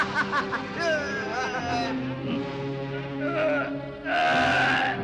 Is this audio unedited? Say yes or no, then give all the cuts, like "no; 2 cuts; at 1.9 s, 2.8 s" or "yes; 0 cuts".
no; 1 cut; at 1.9 s